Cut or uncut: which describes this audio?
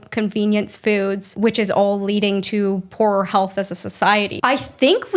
cut